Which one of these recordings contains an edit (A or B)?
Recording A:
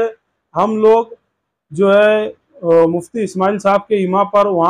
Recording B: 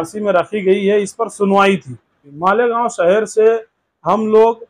B